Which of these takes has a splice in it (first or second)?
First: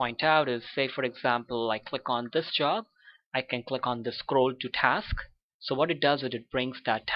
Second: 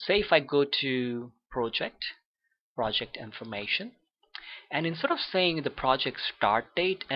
first